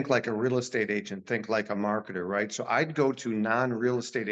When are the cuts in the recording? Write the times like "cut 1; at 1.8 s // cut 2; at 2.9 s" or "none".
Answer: none